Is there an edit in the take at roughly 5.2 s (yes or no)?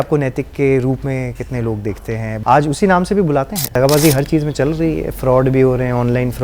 no